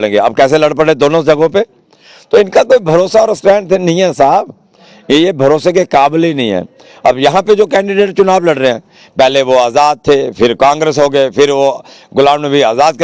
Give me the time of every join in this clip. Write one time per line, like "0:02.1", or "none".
none